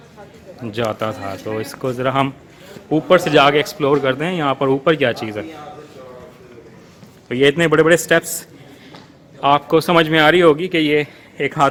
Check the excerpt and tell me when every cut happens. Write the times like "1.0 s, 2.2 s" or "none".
none